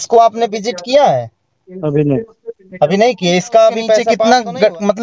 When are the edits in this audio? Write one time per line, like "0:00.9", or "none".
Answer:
0:04.1